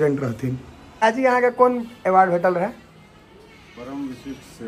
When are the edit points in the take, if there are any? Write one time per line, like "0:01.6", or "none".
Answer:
0:01.0